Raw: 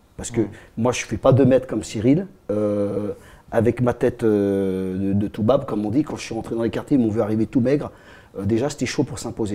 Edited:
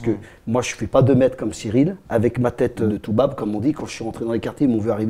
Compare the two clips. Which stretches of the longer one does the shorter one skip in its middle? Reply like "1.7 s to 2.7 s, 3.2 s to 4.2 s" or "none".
2.3 s to 3.4 s, 4.3 s to 5.2 s